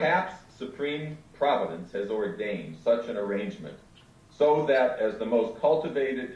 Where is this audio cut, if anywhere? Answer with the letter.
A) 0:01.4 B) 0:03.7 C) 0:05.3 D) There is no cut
C